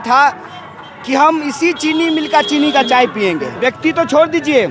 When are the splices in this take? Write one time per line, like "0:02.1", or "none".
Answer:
0:03.5